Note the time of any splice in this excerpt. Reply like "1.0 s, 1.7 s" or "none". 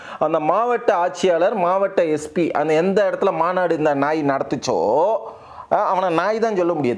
none